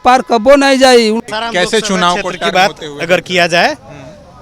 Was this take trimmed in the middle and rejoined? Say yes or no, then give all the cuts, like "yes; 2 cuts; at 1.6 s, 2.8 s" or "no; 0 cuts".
yes; 1 cut; at 1.2 s